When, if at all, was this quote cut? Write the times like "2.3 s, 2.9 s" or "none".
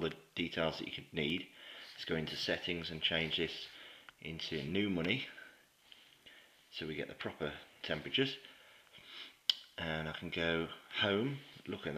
4.2 s